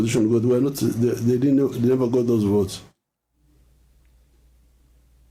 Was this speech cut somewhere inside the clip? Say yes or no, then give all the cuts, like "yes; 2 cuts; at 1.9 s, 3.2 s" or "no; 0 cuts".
no; 0 cuts